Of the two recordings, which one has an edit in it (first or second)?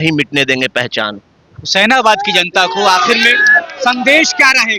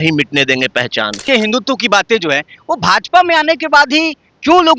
second